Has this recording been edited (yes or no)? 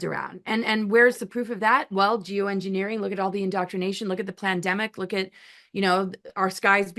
no